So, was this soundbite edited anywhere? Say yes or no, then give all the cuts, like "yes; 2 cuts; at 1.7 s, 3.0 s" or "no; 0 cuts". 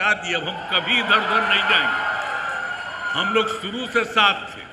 no; 0 cuts